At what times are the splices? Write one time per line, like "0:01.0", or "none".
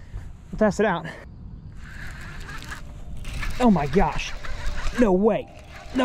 0:01.3